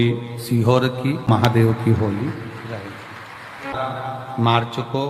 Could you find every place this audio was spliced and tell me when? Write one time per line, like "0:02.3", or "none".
0:01.3